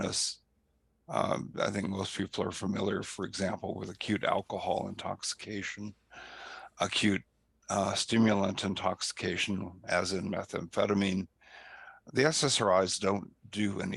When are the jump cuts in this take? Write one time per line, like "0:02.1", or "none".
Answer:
none